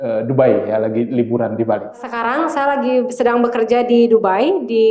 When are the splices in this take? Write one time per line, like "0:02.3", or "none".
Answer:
0:02.1